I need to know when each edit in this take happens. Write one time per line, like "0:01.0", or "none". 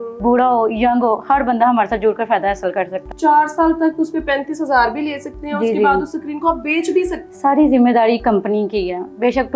0:03.0
0:07.2